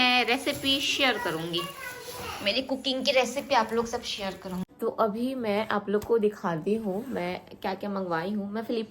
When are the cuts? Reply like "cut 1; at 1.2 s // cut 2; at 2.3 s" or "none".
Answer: cut 1; at 4.6 s